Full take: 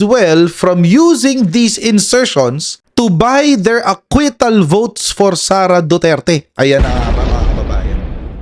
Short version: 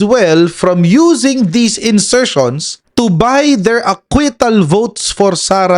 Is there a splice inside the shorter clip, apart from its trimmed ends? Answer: no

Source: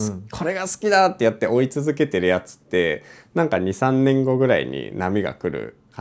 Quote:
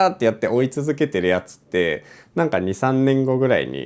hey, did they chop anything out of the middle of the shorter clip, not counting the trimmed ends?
no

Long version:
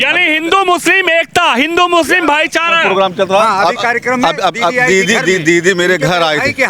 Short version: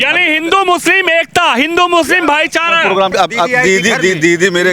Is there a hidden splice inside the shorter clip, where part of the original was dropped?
yes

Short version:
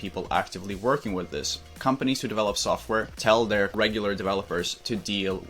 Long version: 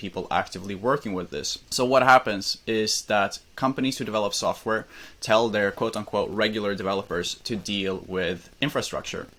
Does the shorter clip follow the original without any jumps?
no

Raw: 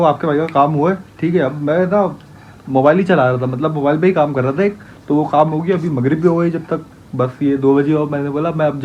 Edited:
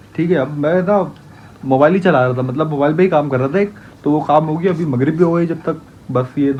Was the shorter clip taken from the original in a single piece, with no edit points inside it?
yes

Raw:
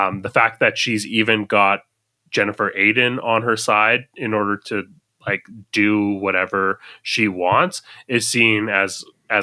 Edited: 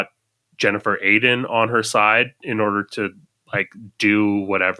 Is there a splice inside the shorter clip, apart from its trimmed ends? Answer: no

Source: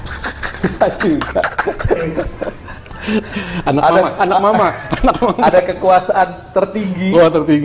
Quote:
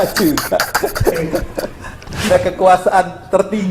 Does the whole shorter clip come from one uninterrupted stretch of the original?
no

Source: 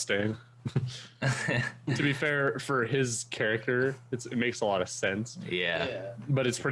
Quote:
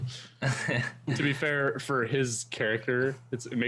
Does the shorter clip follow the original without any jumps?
yes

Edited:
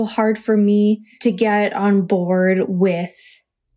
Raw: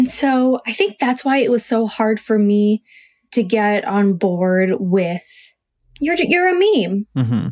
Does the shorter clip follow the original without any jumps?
no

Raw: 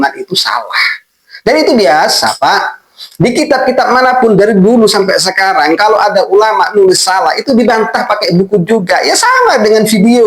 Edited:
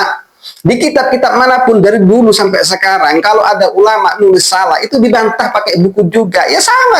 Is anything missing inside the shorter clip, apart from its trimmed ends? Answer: no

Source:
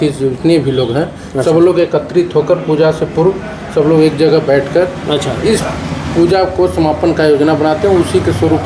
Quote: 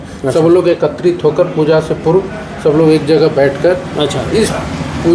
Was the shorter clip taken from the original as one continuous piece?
yes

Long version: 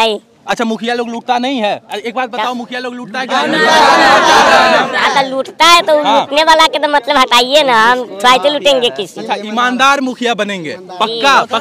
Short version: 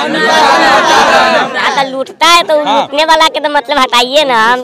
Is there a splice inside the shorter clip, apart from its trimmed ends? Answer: no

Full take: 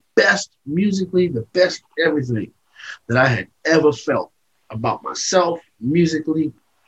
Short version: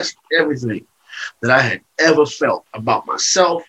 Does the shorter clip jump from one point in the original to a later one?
yes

